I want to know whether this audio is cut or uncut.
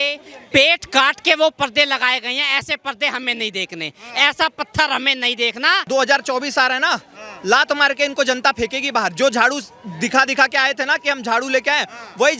cut